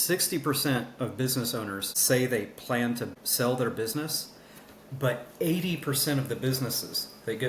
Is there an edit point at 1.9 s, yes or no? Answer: yes